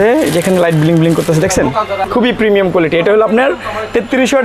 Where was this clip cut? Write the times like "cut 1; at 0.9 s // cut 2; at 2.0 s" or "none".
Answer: cut 1; at 2.0 s